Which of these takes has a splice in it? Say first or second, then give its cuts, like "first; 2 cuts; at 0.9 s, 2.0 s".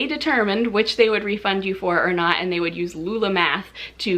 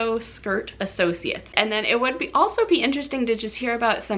second; 1 cut; at 1.5 s